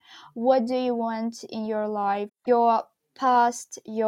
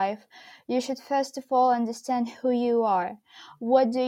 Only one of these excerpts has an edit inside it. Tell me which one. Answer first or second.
first